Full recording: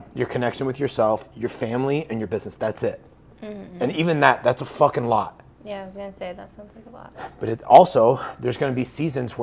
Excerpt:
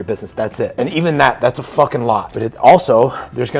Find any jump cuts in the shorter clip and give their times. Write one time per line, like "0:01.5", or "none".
0:00.7
0:02.3